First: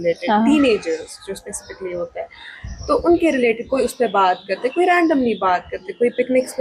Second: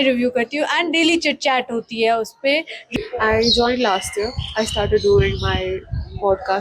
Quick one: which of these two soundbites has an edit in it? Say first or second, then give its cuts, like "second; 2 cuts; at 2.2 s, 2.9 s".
second; 1 cut; at 2.8 s